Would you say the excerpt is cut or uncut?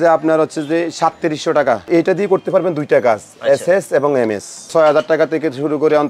cut